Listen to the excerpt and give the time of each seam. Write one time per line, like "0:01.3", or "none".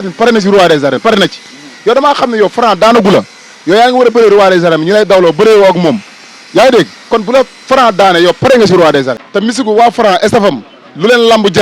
0:09.2